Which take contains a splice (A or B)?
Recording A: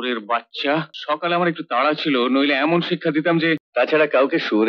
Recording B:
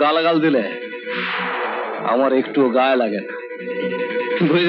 A